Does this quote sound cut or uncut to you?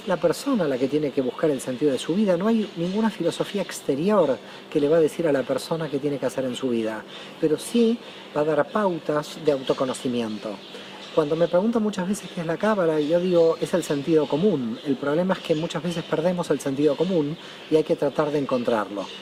uncut